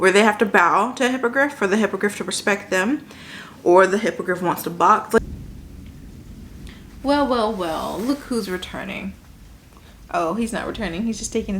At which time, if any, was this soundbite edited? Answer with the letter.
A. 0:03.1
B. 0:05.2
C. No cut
B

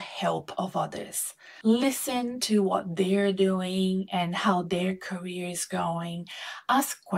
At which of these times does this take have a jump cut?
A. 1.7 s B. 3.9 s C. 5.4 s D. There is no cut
D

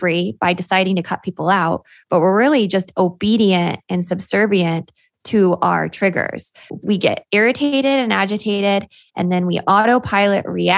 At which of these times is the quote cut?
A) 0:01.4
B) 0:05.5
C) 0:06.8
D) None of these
C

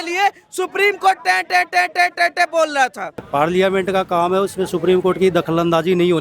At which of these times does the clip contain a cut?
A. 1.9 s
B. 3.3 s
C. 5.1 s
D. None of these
B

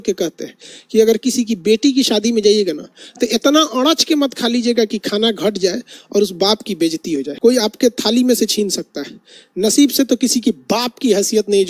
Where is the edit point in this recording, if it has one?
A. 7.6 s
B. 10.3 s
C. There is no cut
A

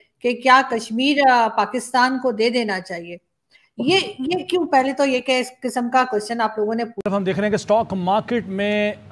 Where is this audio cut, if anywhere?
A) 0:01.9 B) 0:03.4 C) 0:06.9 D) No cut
C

